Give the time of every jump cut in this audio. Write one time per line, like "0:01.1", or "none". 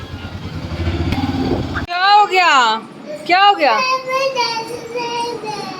0:01.8